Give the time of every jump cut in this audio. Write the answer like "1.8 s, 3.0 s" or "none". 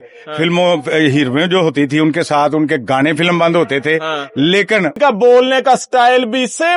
5.0 s